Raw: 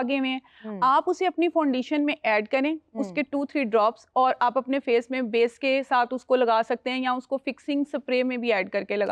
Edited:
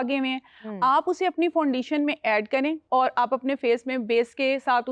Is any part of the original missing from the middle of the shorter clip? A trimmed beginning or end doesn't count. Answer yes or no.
yes